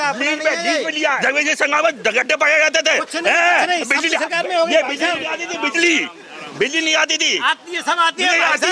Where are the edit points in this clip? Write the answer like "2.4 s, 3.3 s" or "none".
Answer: 1.2 s

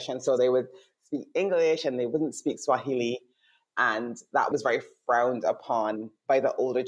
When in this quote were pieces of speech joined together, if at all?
4.5 s

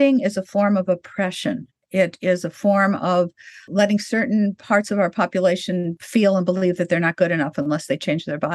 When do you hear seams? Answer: 3.7 s, 5.9 s

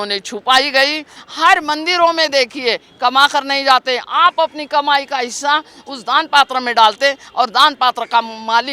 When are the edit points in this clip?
1.2 s

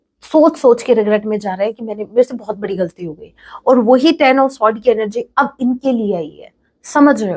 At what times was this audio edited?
none

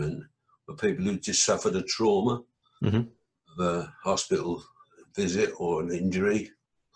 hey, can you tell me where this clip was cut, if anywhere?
none

